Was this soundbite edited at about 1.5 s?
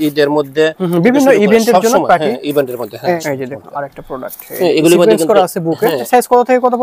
no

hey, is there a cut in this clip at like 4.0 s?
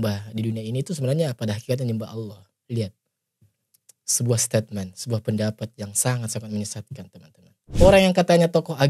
no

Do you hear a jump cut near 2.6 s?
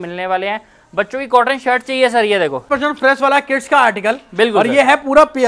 yes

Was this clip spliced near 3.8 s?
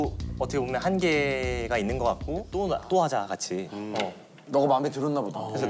no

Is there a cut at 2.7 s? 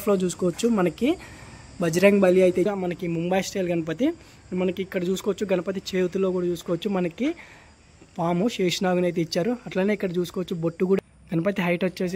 yes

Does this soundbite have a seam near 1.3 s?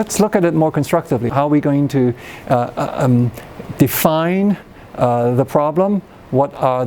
yes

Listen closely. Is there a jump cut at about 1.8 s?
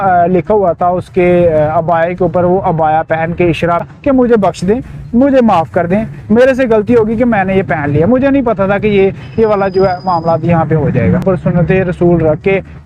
no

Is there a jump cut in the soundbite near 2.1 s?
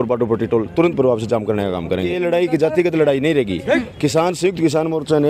yes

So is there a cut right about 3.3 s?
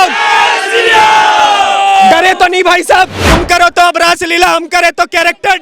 yes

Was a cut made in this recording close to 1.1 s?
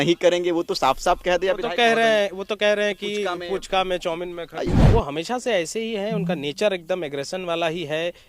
no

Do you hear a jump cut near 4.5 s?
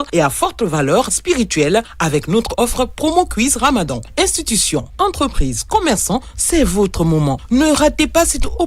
no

